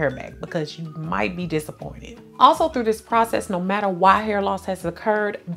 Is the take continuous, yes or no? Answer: yes